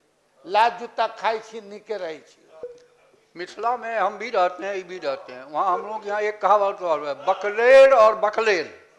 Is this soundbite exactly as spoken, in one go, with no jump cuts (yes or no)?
no